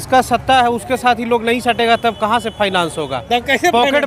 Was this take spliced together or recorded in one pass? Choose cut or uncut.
uncut